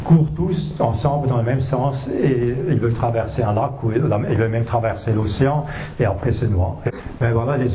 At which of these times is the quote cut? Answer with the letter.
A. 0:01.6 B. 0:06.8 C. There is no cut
B